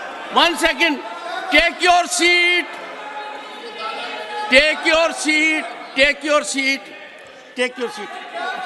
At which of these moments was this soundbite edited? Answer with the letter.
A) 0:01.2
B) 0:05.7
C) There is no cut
C